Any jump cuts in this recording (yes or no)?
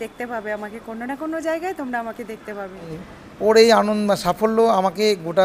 yes